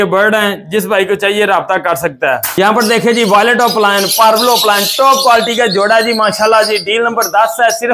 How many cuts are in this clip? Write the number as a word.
one